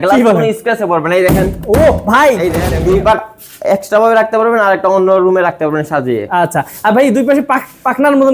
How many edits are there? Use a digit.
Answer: 1